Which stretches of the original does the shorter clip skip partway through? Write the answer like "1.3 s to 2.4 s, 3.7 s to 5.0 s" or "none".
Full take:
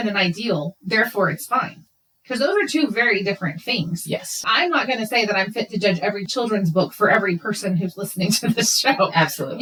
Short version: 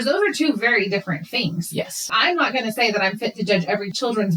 none